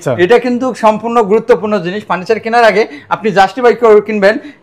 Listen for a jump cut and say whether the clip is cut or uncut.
uncut